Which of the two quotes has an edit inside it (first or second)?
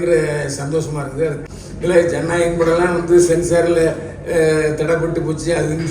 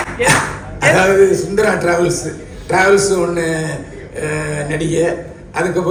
first